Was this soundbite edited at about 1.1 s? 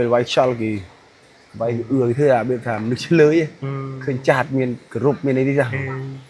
no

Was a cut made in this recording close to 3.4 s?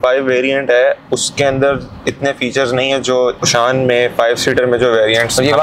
yes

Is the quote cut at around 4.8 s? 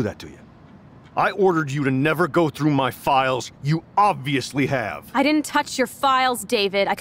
no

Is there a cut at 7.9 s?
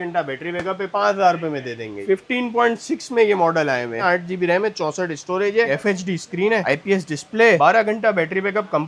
no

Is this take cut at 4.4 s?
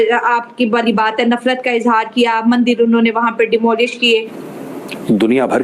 yes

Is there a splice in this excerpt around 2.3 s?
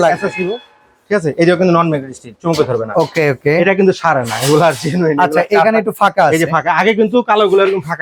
no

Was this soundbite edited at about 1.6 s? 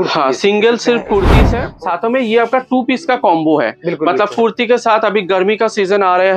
yes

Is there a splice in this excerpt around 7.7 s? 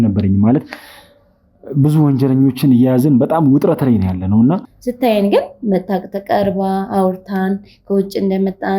no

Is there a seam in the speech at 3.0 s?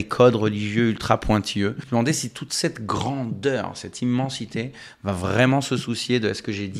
no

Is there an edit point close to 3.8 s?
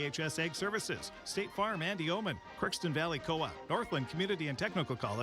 no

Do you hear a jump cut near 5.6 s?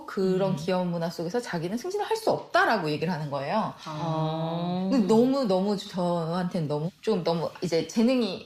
no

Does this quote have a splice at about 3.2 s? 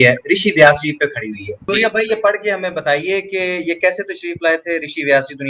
no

